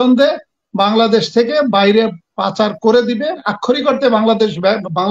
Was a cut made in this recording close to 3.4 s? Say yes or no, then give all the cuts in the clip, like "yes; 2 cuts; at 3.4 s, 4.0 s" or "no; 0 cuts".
yes; 1 cut; at 3.4 s